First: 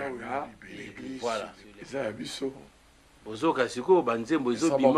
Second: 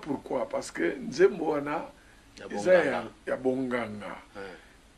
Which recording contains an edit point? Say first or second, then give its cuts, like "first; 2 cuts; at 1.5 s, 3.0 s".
first; 1 cut; at 1.2 s